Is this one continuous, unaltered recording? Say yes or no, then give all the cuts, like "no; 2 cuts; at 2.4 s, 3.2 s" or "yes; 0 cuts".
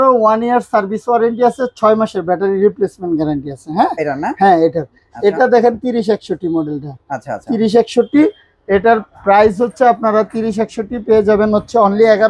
yes; 0 cuts